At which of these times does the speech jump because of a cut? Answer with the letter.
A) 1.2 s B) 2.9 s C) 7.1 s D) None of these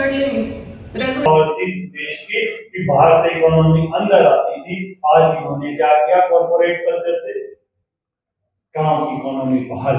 A